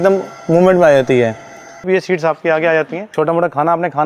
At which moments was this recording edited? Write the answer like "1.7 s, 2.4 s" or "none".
1.8 s, 3.0 s